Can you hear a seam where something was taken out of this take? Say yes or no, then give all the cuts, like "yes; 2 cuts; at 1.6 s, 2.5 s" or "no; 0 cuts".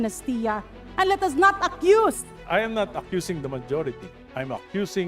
yes; 1 cut; at 2.3 s